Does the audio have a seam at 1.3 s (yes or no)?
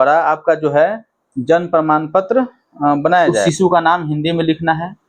no